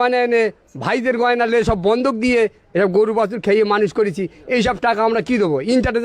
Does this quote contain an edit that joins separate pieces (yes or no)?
no